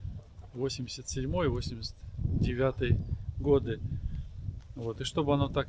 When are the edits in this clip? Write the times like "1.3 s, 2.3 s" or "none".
none